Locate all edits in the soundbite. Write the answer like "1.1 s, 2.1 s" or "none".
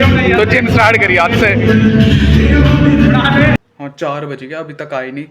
3.8 s